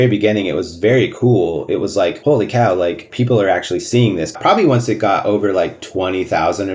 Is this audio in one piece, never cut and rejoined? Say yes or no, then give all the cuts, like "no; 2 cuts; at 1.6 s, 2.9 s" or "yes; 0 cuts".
no; 4 cuts; at 2.2 s, 3.0 s, 4.3 s, 5.8 s